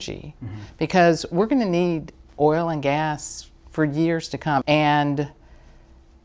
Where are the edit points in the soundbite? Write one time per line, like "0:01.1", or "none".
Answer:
0:04.6